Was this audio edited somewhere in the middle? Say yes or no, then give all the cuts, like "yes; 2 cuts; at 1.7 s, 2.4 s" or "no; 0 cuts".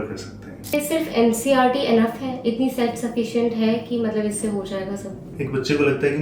yes; 2 cuts; at 0.7 s, 5.3 s